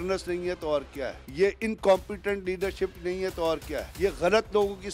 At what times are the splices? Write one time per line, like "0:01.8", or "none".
0:01.2
0:03.9